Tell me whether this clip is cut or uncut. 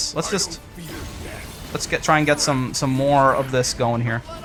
uncut